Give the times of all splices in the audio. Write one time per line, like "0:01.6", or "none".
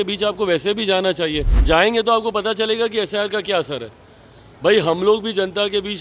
0:01.5